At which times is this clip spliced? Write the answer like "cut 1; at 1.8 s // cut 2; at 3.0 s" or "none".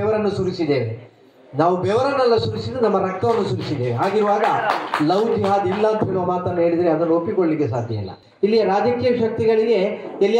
cut 1; at 8.2 s